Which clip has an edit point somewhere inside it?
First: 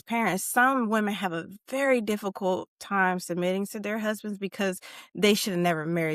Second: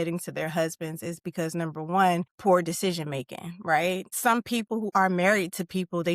second; 2 cuts; at 2.3 s, 4.6 s

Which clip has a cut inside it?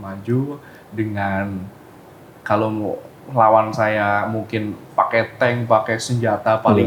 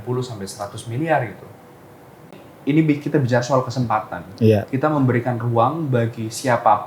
second; 1 cut; at 2.3 s

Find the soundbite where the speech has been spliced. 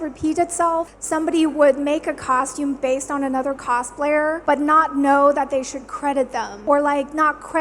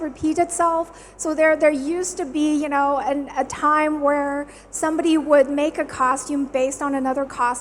first; 3 cuts; at 1.0 s, 4.4 s, 6.6 s

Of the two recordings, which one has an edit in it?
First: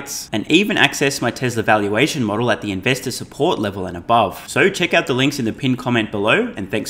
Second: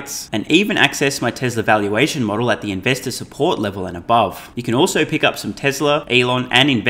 second; 2 cuts; at 4.5 s, 6.1 s

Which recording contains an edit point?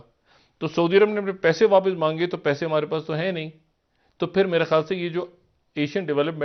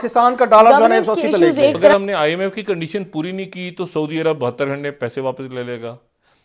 second; 1 cut; at 1.9 s

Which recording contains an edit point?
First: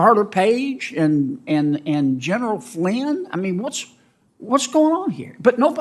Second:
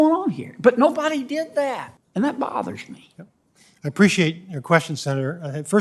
second; 1 cut; at 1.9 s

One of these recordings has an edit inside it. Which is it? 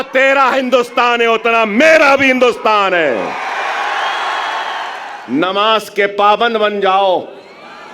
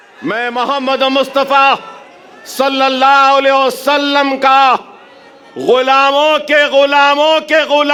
first; 1 cut; at 5.0 s

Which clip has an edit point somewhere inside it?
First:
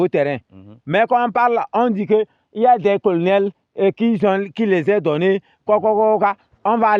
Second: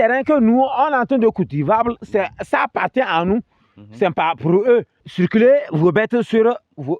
second; 1 cut; at 5.0 s

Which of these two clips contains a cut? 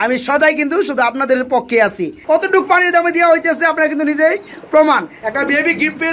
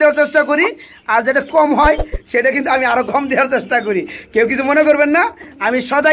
first; 2 cuts; at 2.1 s, 5.1 s

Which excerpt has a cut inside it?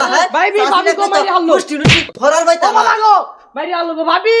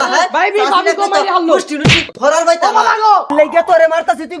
second; 1 cut; at 3.3 s

